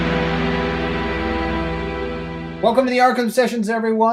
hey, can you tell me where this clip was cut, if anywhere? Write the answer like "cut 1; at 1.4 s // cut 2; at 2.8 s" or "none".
none